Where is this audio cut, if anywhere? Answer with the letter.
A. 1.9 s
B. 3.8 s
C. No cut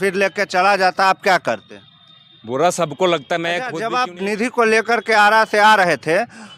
B